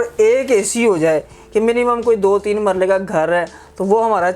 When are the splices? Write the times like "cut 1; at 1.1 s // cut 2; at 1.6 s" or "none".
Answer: none